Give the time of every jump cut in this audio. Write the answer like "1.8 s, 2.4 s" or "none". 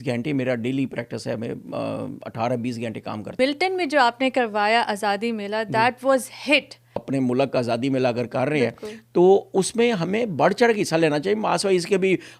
3.4 s, 7.0 s